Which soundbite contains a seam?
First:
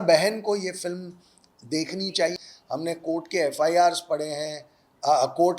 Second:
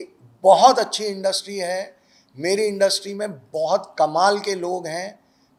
first; 1 cut; at 2.3 s

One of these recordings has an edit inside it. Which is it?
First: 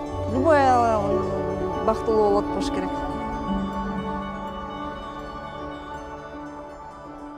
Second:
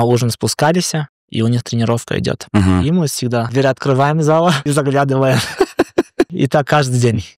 second; 3 cuts; at 3.5 s, 4.6 s, 6.3 s

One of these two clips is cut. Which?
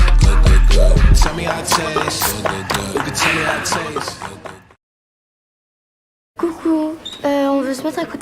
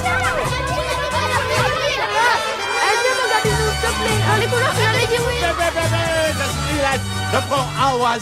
first; 1 cut; at 1.0 s

